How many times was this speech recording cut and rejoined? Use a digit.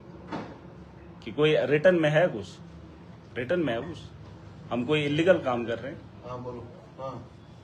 0